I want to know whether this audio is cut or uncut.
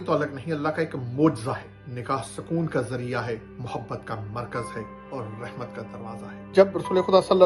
uncut